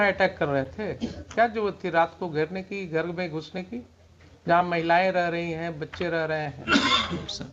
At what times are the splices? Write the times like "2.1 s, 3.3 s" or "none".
none